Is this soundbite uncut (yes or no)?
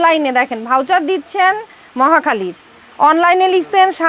yes